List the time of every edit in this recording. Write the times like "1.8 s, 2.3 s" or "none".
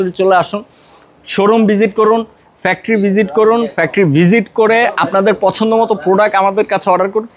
none

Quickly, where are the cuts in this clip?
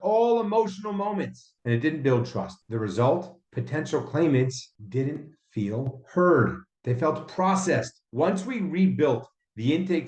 2.6 s, 8.0 s

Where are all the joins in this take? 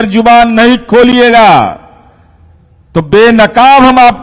none

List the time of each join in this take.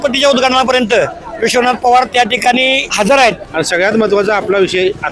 2.9 s, 3.4 s

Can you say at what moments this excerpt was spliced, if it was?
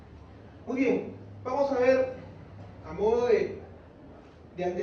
3.2 s

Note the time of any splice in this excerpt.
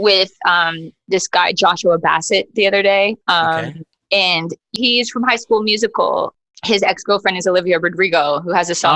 4.7 s, 6.4 s

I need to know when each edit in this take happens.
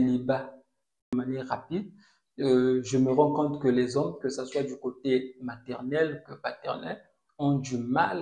1.1 s

